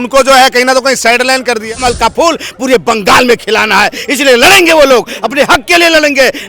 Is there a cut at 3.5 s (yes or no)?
no